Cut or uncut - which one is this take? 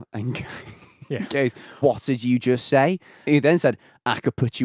cut